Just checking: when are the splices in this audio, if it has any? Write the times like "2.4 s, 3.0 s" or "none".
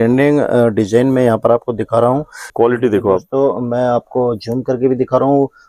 2.5 s